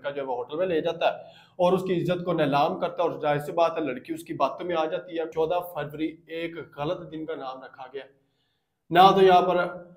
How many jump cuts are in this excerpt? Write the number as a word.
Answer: one